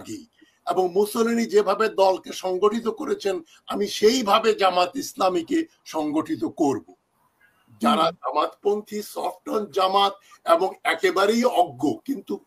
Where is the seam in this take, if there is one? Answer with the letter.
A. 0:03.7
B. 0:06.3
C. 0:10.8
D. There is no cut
D